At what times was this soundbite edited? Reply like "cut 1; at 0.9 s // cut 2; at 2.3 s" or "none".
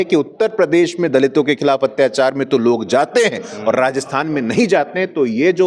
none